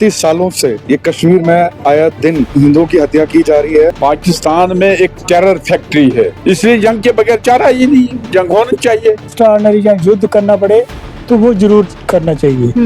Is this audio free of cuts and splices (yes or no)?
no